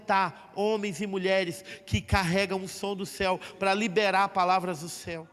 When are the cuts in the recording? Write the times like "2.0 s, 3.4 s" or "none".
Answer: none